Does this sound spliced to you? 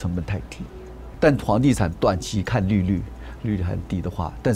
yes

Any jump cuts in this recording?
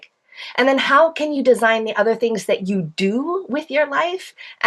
no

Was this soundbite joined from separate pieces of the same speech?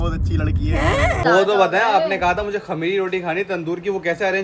yes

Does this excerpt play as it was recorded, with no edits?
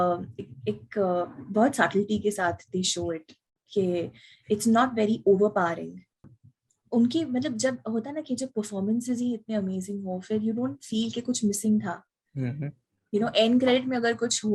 no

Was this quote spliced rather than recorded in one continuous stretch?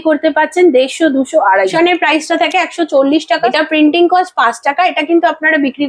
yes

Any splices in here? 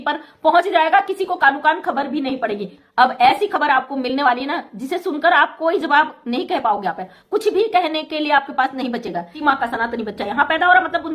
yes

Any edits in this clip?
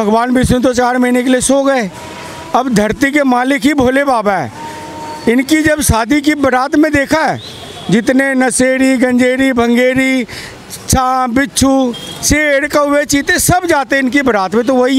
no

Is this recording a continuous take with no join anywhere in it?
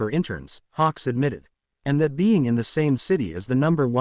yes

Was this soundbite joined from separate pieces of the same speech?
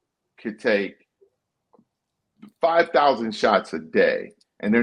no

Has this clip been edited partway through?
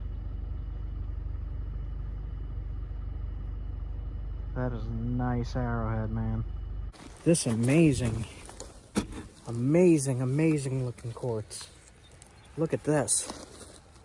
yes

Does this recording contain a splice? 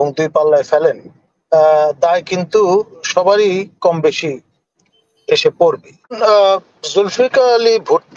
yes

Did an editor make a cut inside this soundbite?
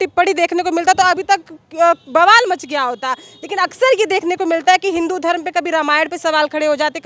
no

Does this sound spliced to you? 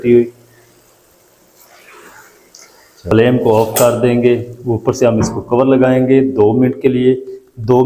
yes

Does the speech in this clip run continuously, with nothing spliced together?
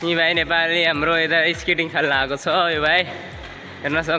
yes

